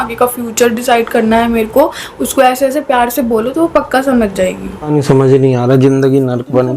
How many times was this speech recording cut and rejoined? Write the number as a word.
one